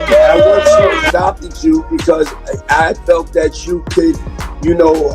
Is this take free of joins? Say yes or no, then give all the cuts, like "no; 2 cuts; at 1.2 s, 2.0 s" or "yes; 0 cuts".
no; 1 cut; at 1.1 s